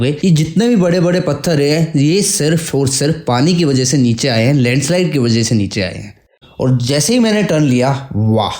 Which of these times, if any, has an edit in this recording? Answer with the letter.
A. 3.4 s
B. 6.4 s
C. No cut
B